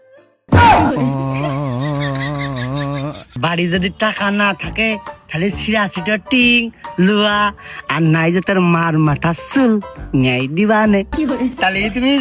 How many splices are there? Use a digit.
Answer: 1